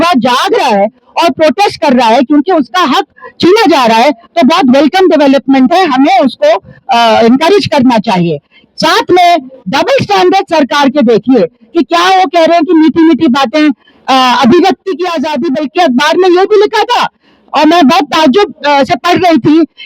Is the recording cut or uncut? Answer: uncut